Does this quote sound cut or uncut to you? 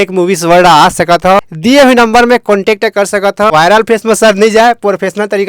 cut